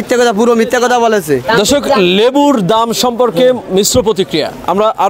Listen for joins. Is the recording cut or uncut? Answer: uncut